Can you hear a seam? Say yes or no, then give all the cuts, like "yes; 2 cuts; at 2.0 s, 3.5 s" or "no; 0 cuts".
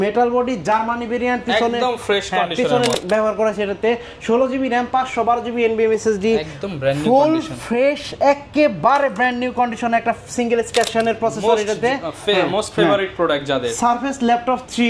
yes; 2 cuts; at 2.9 s, 10.9 s